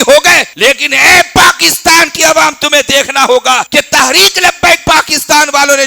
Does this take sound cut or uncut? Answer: uncut